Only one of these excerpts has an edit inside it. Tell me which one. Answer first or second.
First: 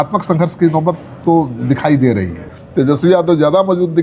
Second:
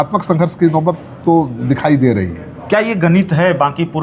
first